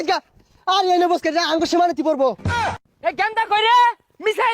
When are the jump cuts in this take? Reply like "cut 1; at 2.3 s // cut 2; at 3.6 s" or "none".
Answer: cut 1; at 2.7 s